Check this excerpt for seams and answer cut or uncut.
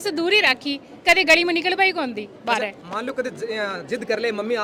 uncut